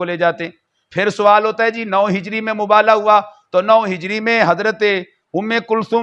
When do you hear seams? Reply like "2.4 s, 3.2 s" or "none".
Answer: none

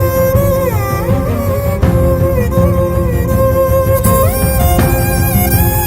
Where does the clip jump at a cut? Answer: none

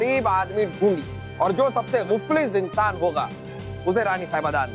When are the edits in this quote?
1.2 s, 2.0 s

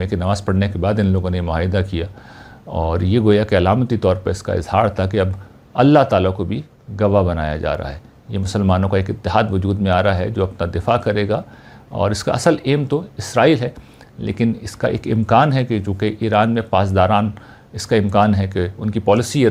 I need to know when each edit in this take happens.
none

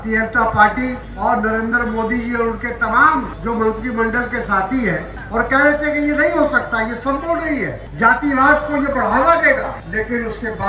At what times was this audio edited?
1.1 s, 3.3 s, 5.1 s, 7.8 s, 9.8 s

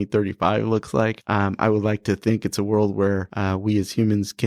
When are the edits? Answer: 1.2 s, 3.3 s

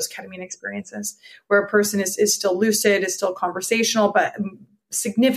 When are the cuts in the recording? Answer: none

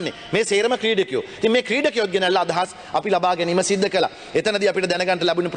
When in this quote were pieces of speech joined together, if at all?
none

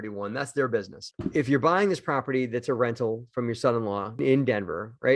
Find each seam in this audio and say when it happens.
1.1 s

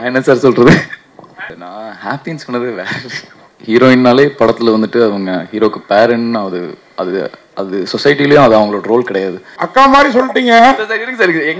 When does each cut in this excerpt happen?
1.6 s, 3.5 s, 9.5 s

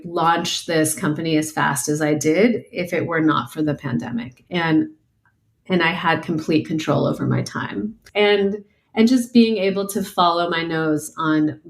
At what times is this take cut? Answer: 8.0 s

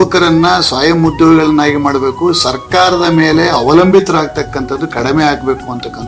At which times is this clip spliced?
none

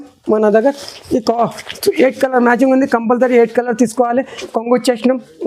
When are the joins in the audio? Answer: 4.4 s

